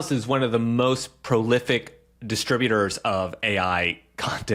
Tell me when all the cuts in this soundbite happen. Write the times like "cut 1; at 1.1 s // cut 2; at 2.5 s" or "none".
none